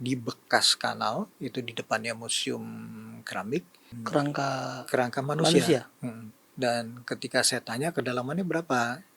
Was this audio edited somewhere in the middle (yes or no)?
no